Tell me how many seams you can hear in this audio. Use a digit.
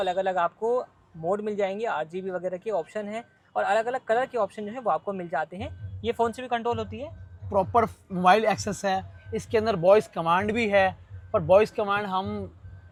0